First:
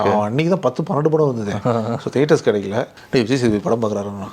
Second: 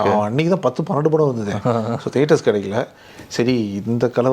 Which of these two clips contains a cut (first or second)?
first